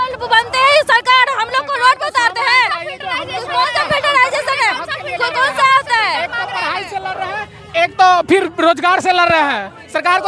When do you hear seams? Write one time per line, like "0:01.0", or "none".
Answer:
none